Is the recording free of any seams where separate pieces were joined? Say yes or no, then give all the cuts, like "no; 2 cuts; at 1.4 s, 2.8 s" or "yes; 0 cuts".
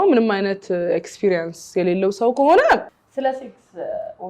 no; 1 cut; at 3.0 s